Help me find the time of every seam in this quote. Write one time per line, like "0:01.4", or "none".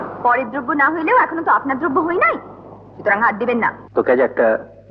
0:03.8